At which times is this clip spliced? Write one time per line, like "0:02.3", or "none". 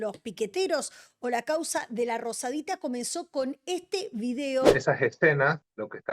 0:04.7